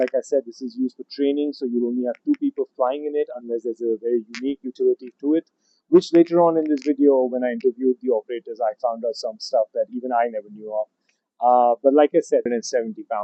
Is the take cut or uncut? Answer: uncut